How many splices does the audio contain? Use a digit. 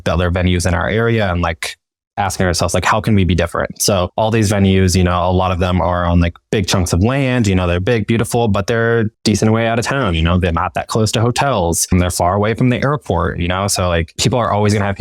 0